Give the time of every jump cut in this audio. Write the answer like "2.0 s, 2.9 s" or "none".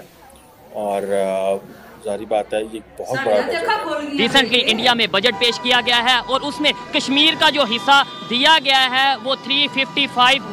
3.7 s